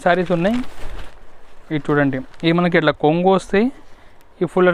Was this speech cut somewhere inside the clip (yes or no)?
no